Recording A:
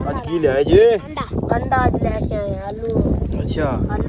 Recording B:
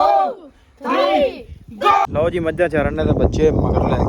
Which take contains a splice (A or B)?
B